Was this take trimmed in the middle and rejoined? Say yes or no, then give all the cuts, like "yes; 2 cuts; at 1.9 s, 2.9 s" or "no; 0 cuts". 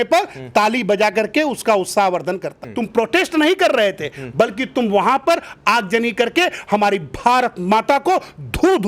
yes; 1 cut; at 2.6 s